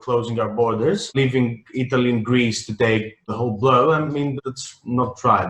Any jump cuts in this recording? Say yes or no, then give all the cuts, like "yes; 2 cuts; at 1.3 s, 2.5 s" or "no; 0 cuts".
no; 0 cuts